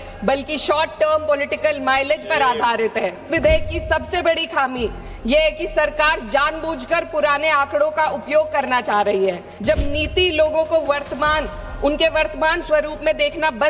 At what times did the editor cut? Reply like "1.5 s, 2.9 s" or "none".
3.3 s, 9.5 s